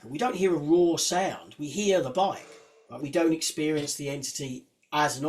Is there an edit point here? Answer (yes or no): yes